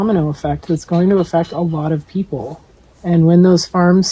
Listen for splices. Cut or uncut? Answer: uncut